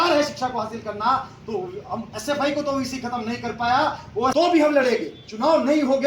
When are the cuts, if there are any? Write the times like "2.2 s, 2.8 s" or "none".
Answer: 4.3 s